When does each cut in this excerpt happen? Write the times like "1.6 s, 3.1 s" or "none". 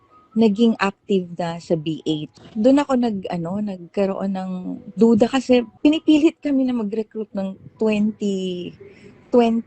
2.4 s, 5.7 s